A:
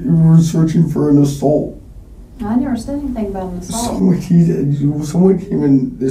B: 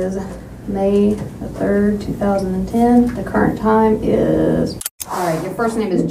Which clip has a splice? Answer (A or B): B